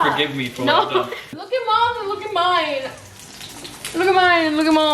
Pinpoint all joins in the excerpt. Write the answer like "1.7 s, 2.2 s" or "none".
1.3 s